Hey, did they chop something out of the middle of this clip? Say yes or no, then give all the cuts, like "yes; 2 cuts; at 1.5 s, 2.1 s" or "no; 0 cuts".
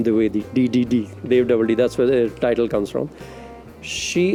no; 0 cuts